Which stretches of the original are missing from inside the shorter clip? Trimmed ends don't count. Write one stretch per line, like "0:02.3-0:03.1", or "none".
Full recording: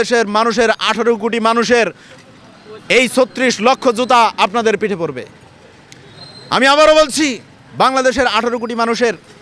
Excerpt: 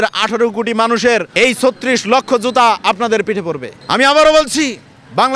0:01.9-0:02.8
0:05.3-0:06.3